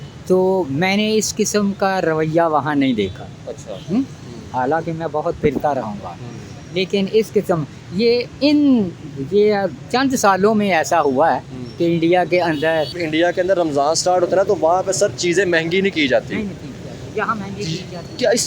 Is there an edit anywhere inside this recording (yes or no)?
yes